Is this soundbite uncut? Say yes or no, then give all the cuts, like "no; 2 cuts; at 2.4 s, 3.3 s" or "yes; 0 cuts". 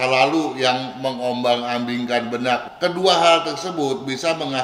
no; 1 cut; at 2.7 s